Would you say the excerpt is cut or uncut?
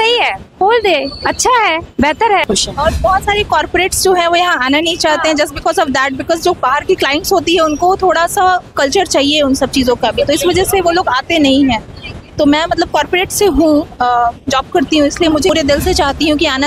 cut